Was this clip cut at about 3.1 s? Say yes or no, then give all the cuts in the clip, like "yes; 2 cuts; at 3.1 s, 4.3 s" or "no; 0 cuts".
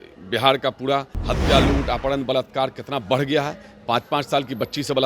no; 1 cut; at 1.2 s